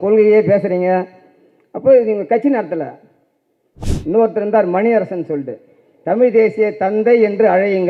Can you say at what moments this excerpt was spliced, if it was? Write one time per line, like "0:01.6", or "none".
0:03.7